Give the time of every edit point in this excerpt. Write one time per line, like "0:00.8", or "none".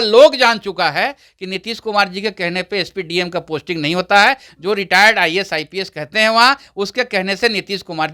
none